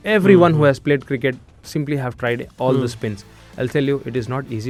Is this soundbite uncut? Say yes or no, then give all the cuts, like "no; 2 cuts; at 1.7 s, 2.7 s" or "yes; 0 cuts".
yes; 0 cuts